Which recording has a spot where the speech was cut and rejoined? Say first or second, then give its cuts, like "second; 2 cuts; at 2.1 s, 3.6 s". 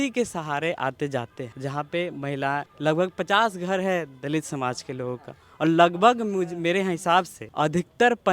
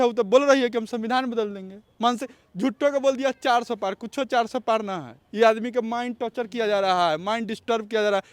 first; 3 cuts; at 1.4 s, 2.7 s, 7.4 s